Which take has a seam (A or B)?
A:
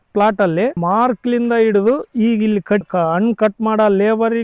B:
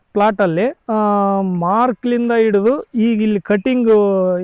A